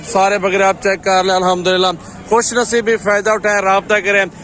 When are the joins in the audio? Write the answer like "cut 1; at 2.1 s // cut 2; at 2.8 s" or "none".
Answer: none